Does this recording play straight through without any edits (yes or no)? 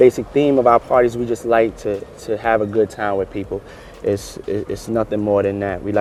yes